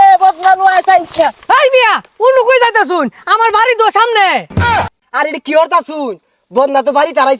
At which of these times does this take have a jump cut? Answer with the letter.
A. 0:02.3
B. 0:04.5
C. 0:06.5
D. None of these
D